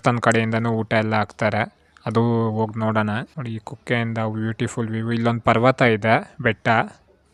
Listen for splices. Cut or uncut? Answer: uncut